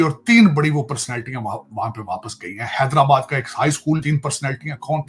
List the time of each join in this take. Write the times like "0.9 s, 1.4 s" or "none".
4.0 s